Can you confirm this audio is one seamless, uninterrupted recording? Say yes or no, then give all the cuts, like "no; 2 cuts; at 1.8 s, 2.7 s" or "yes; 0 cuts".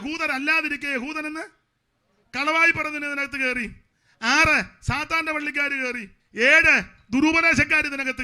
no; 1 cut; at 6.2 s